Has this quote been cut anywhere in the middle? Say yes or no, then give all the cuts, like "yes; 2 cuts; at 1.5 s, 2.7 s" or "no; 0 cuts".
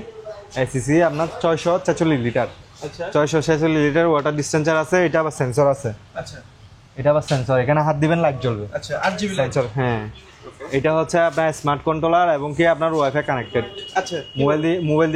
no; 0 cuts